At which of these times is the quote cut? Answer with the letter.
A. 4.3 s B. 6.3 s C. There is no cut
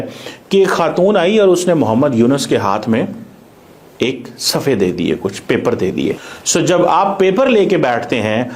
B